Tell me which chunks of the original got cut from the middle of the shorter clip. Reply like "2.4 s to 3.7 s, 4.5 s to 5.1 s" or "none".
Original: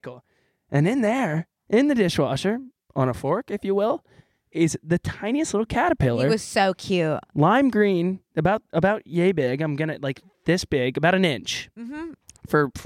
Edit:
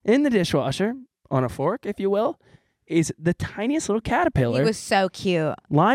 none